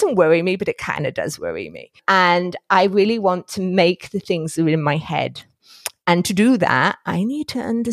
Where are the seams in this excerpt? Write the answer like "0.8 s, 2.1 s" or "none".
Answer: 2.0 s